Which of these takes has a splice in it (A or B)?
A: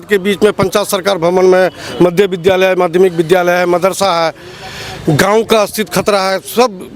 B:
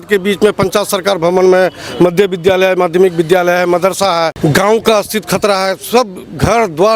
B